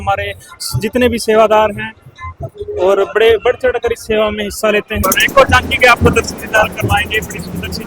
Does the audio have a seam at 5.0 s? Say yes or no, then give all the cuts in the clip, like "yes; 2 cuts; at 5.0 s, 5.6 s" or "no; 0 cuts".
yes; 1 cut; at 5.0 s